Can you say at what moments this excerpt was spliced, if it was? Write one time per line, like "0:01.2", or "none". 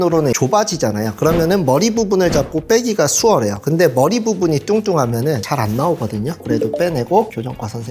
0:06.6